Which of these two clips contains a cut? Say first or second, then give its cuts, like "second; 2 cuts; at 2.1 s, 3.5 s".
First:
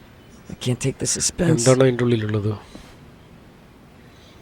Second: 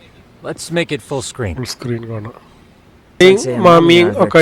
second; 1 cut; at 3.2 s